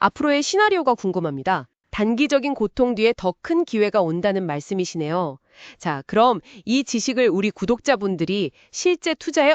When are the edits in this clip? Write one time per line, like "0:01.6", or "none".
0:01.8